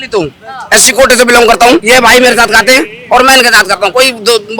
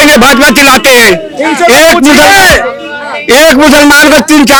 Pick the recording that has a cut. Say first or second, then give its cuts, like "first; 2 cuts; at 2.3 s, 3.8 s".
first; 1 cut; at 1.8 s